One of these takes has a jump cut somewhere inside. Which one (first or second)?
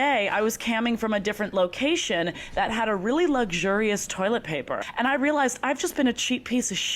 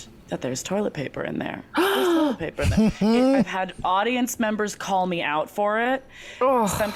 first